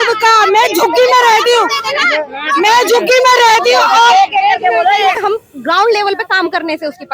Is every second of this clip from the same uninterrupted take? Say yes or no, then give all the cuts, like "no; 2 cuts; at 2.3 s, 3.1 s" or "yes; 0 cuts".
no; 1 cut; at 5.2 s